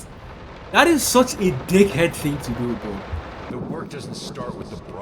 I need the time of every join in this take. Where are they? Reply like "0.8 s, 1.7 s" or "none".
3.5 s